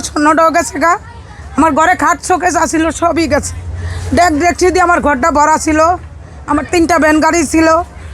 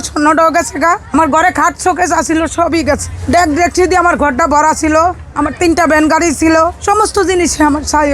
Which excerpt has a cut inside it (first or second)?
second